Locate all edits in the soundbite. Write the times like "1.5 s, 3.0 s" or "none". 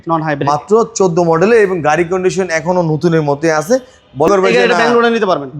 4.3 s